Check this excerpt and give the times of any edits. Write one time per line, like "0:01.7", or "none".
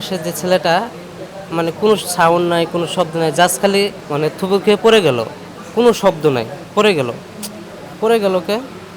none